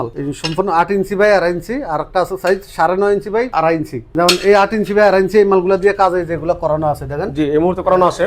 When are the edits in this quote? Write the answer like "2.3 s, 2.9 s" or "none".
3.5 s